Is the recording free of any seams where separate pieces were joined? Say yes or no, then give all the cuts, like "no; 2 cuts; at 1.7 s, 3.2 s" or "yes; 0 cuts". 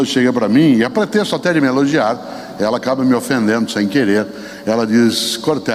yes; 0 cuts